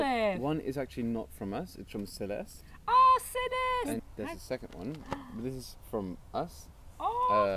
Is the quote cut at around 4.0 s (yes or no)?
yes